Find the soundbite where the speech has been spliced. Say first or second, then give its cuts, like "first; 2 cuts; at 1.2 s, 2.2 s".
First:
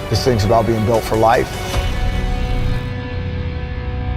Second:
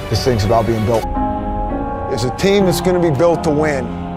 first; 1 cut; at 1.1 s